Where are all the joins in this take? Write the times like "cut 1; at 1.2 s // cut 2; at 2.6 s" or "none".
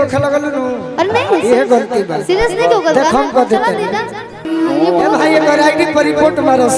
cut 1; at 4.5 s

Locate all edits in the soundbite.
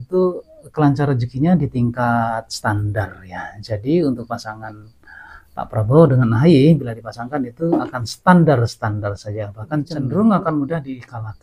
none

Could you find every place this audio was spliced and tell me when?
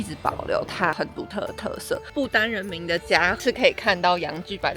cut 1; at 2.1 s // cut 2; at 3.4 s

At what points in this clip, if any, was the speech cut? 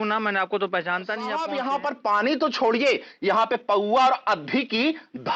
cut 1; at 1.4 s

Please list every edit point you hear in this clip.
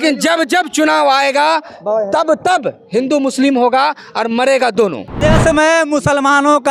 cut 1; at 5.1 s

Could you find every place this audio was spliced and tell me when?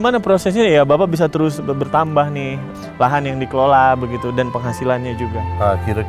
cut 1; at 2.7 s

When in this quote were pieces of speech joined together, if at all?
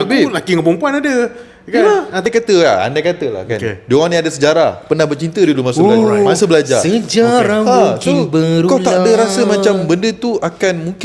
cut 1; at 2.3 s

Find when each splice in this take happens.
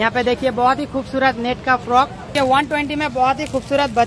cut 1; at 2.3 s

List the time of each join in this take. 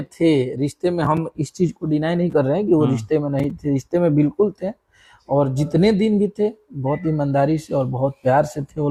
none

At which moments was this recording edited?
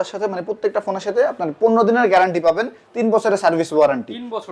none

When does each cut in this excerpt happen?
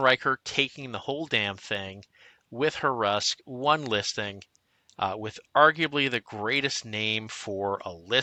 none

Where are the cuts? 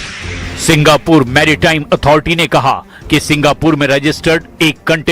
cut 1; at 3.8 s

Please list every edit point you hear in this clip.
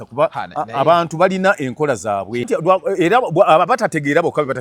cut 1; at 2.5 s

